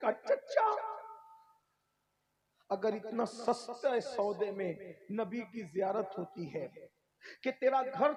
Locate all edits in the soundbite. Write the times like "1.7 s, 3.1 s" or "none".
none